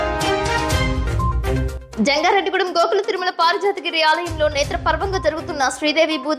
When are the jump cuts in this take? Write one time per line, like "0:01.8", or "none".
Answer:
0:01.3